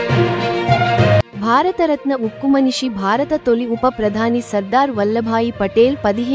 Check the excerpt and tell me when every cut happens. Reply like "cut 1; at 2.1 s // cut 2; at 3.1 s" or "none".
cut 1; at 1.3 s